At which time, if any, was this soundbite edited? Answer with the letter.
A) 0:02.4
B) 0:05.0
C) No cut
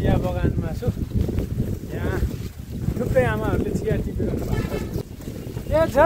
B